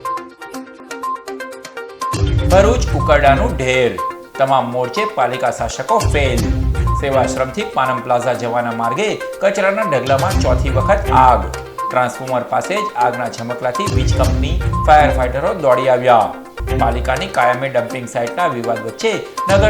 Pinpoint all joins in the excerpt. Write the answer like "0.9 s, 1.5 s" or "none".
1.0 s